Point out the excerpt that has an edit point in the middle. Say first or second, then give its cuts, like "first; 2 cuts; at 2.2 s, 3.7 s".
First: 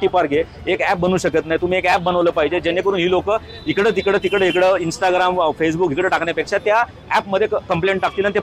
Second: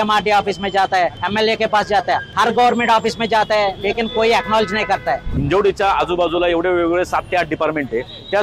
second; 3 cuts; at 1.2 s, 2.3 s, 5.3 s